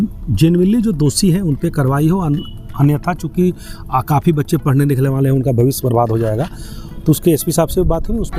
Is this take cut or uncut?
uncut